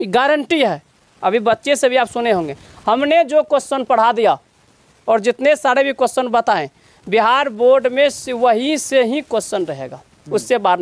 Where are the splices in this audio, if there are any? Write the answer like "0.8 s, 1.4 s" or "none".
none